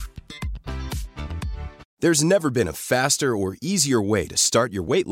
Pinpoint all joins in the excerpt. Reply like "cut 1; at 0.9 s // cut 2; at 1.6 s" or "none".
cut 1; at 1.8 s